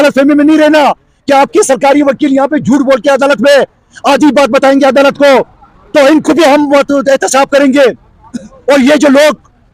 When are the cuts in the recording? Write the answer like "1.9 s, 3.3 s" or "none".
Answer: none